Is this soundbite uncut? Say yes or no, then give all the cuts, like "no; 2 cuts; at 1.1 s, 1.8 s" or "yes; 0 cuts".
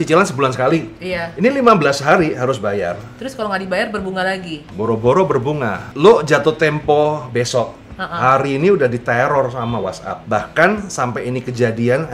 no; 3 cuts; at 4.6 s, 5.8 s, 10.1 s